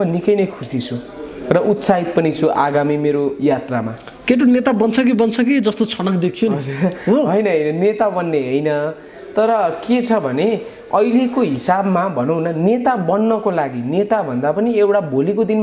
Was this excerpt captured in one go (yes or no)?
yes